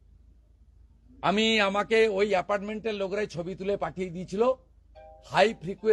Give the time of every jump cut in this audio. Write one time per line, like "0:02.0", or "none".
none